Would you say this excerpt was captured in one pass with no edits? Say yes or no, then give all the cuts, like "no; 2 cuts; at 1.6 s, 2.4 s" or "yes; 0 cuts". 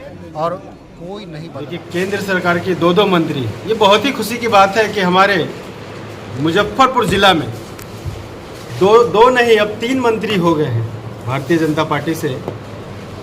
no; 1 cut; at 1.5 s